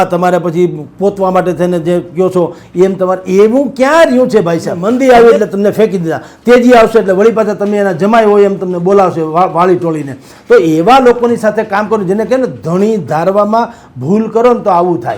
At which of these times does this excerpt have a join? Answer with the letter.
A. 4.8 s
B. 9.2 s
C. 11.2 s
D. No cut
A